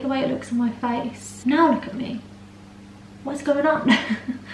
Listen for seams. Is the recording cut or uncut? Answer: cut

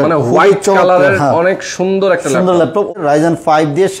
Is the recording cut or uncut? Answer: cut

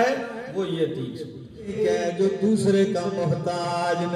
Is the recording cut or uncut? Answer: cut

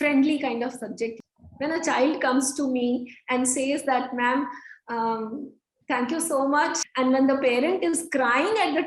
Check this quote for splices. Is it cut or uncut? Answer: cut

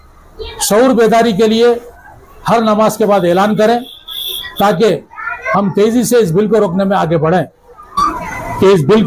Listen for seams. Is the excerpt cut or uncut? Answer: cut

